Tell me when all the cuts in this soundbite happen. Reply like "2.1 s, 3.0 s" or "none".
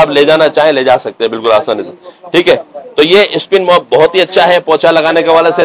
none